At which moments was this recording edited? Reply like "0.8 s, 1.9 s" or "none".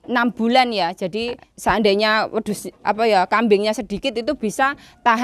1.4 s